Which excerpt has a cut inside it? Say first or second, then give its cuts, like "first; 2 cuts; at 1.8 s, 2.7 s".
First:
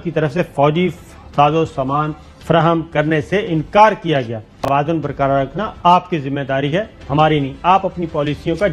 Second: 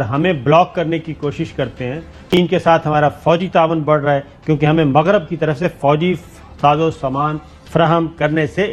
second; 1 cut; at 2.2 s